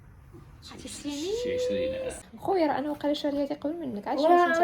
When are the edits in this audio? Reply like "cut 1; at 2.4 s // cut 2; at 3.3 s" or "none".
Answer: cut 1; at 2.1 s